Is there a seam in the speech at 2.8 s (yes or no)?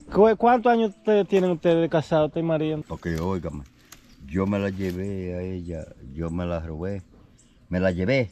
yes